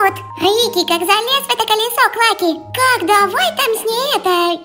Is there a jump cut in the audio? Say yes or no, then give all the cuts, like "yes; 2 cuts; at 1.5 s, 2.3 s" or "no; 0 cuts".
no; 0 cuts